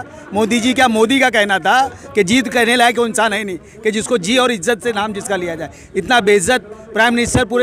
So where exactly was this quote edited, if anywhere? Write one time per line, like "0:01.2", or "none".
none

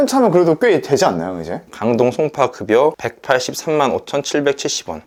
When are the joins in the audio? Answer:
none

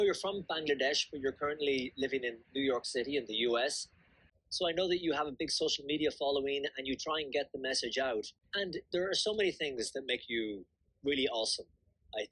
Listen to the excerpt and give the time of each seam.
0:04.3
0:08.4

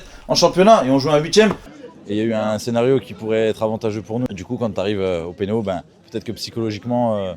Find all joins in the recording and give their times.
0:01.7
0:04.3

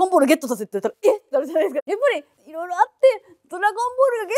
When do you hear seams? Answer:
0:01.7

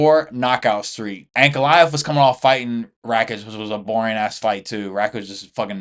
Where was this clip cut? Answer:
none

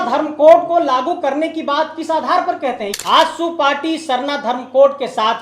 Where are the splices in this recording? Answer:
0:02.9

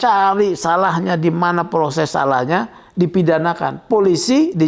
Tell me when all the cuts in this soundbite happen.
none

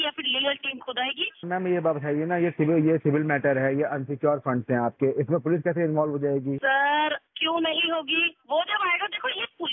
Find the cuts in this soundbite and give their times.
0:01.5
0:06.6

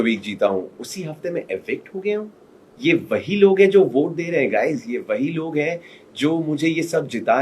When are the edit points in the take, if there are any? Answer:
none

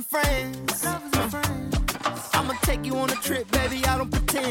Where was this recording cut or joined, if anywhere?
none

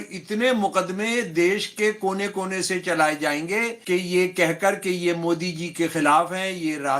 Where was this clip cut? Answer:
0:03.8

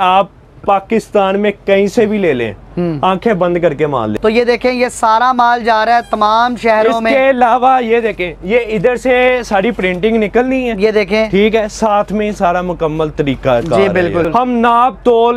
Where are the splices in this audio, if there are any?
0:04.1
0:14.3

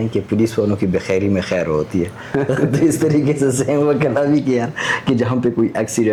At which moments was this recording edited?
none

